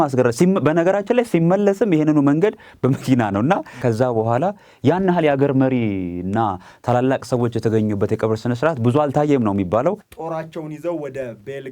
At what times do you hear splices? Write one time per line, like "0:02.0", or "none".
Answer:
0:03.8
0:10.1